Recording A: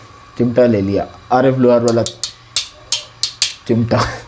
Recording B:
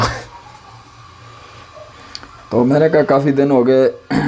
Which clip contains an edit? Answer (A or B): B